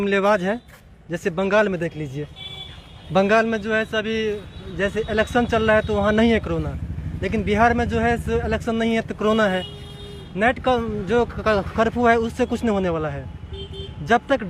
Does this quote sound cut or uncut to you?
uncut